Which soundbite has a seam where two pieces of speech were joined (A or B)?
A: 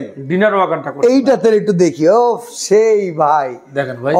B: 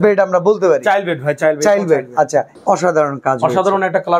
B